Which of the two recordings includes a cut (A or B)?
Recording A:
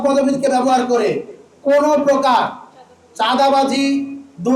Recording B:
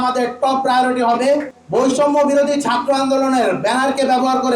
B